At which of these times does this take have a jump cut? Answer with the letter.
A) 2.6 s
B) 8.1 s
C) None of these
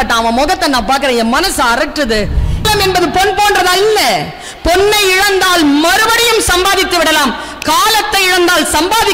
A